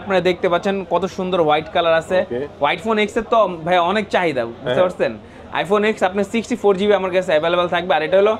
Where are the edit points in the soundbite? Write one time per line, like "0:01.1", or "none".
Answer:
none

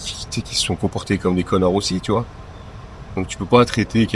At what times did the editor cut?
none

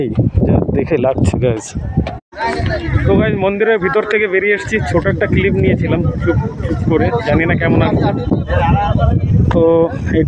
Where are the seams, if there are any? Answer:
0:02.3

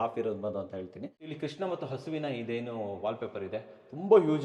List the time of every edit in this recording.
0:01.1

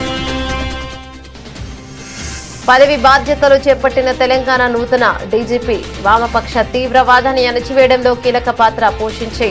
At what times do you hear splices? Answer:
none

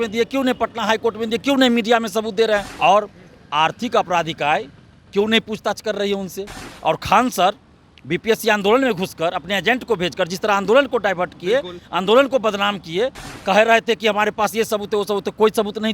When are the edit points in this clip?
0:02.7
0:06.7
0:13.3

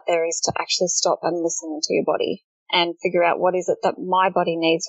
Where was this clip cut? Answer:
none

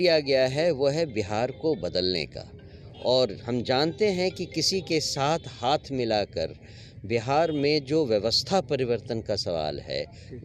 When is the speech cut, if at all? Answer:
none

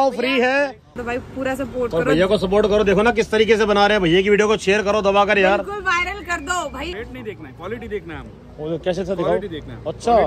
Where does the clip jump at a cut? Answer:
0:01.0
0:06.9

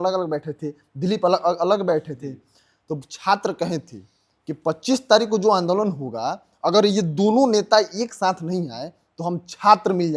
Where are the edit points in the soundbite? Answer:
none

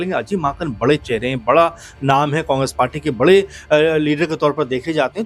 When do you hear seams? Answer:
none

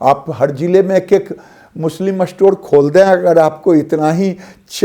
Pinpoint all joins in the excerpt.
none

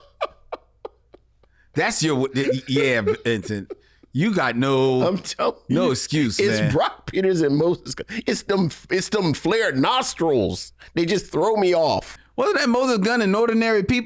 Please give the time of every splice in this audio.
0:12.1

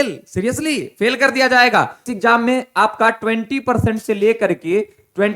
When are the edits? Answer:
0:02.0

